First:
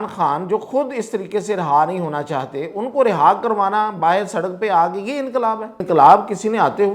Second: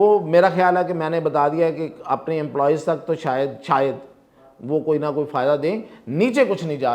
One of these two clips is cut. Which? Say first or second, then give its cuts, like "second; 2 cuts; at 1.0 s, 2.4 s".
first; 1 cut; at 5.8 s